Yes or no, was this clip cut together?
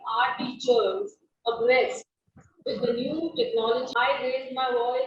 yes